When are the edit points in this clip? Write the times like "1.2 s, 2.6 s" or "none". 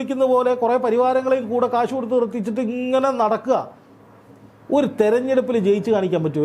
none